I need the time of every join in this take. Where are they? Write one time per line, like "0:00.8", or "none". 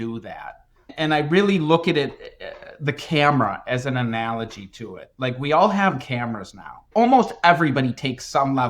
0:06.9